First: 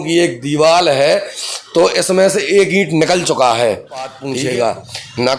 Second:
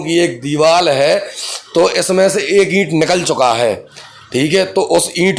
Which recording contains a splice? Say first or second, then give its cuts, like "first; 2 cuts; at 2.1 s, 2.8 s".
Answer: first; 1 cut; at 4.2 s